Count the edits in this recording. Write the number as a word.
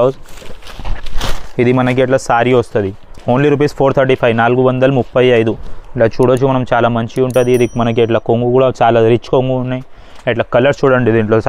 zero